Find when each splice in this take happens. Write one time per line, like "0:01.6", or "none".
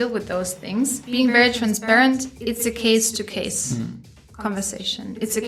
0:01.0